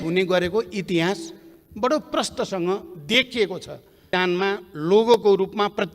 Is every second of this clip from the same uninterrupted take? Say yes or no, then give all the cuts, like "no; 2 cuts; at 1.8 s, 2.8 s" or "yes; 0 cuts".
no; 1 cut; at 4.1 s